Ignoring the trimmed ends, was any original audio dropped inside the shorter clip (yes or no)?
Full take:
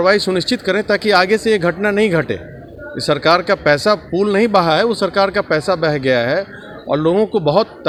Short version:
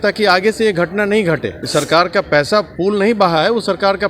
yes